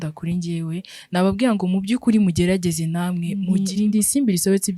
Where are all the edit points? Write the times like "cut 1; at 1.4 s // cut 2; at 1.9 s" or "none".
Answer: cut 1; at 3.5 s